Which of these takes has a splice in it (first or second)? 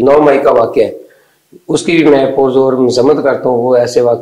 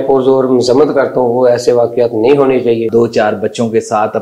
second